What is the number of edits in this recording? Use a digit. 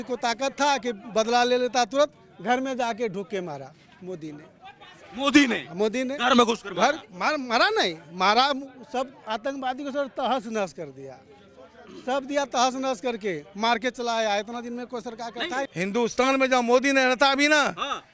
1